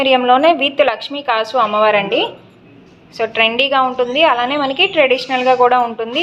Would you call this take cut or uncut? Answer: uncut